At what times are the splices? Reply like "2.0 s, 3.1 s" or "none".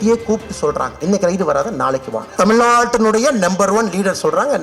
2.3 s